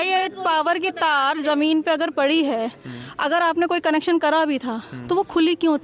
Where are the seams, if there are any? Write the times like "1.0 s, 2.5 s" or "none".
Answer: none